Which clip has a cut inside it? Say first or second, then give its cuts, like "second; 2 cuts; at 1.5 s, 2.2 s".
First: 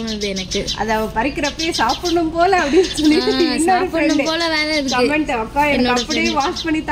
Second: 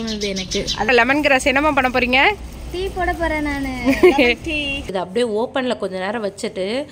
second; 2 cuts; at 0.9 s, 4.8 s